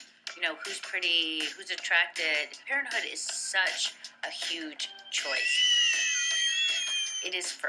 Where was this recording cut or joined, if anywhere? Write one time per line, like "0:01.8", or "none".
none